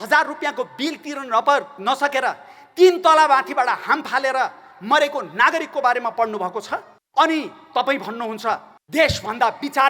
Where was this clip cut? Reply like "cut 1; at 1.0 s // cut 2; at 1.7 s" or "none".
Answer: cut 1; at 7.0 s // cut 2; at 8.7 s